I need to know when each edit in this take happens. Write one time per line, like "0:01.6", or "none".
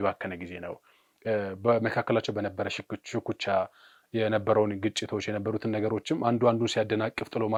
none